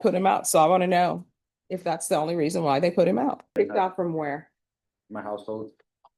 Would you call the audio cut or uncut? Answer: cut